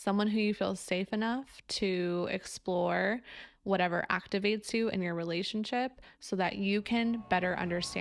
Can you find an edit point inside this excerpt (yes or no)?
no